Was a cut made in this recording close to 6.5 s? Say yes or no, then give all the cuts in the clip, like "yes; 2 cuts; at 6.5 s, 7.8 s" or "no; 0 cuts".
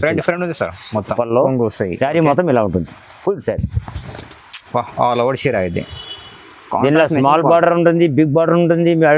no; 1 cut; at 1.1 s